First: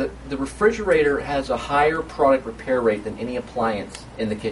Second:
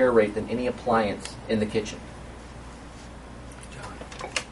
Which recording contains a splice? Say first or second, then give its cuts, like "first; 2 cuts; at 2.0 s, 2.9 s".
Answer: first; 1 cut; at 1.0 s